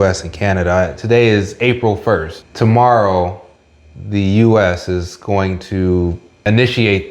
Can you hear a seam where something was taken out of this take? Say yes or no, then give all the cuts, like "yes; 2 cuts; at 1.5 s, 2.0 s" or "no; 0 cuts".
yes; 1 cut; at 2.4 s